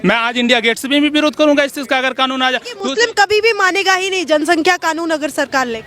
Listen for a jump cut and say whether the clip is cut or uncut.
cut